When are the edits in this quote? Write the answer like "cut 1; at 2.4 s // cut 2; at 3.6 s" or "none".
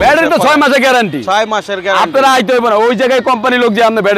none